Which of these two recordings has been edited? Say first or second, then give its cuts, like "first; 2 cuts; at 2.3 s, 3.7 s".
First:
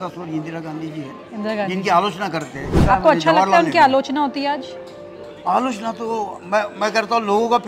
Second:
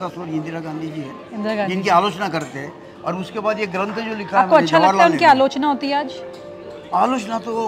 first; 1 cut; at 2.7 s